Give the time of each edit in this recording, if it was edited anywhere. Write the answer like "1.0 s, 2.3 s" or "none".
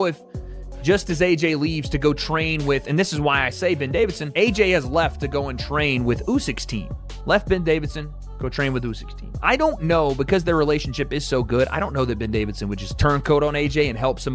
none

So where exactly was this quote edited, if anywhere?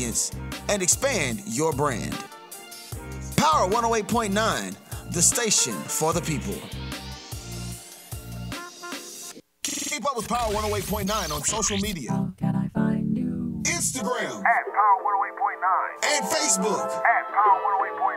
9.4 s

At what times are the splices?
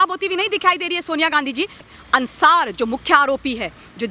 1.8 s

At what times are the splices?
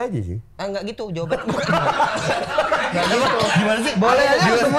none

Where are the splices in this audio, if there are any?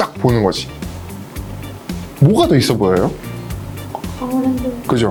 none

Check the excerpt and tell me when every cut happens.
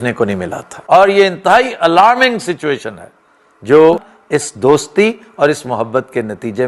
1.0 s, 4.1 s

